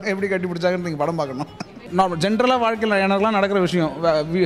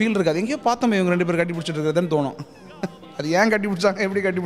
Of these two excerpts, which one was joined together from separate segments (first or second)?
first